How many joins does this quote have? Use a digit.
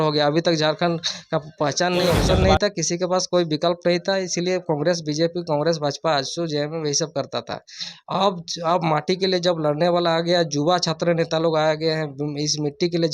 1